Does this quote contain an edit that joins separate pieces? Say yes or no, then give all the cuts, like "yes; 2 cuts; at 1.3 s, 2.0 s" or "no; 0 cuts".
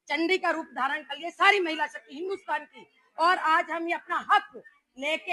no; 0 cuts